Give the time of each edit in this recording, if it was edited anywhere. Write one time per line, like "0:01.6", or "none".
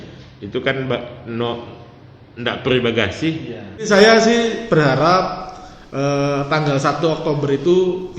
0:03.9

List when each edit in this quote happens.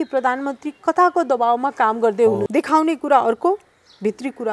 0:02.5

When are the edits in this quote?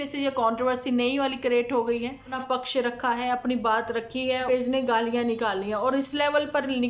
0:02.3
0:04.5

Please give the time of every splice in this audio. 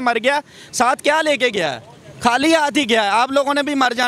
none

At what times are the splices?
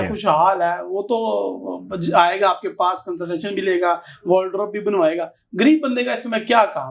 none

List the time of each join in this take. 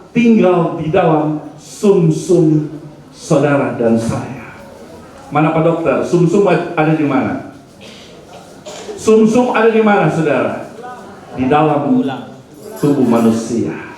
none

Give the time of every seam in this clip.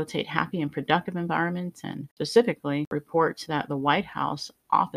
0:02.1
0:02.9

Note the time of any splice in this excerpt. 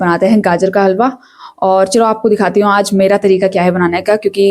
none

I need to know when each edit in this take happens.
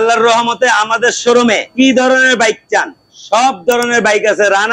0:01.8

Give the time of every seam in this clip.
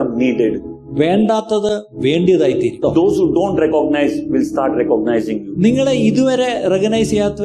0:02.8

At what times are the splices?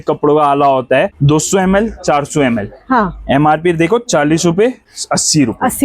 0:01.1
0:04.9

